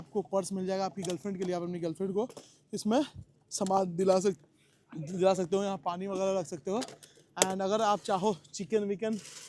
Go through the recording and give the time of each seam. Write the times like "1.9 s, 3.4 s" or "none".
none